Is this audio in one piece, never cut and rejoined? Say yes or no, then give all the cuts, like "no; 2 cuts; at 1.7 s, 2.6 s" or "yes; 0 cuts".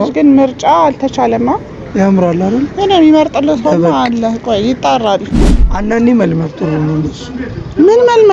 no; 1 cut; at 5.6 s